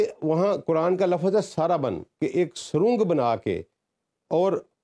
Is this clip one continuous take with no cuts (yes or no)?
yes